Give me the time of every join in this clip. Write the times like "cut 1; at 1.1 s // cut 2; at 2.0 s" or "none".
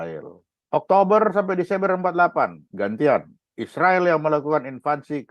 cut 1; at 2.7 s